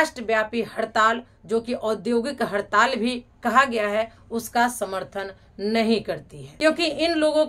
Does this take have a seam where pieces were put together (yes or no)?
yes